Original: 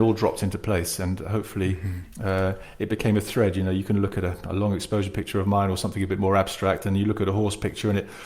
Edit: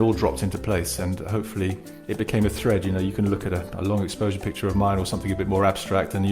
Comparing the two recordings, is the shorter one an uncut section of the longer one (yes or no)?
no